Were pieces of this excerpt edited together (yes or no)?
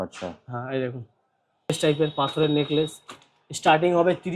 yes